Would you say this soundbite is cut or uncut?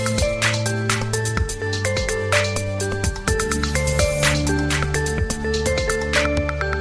uncut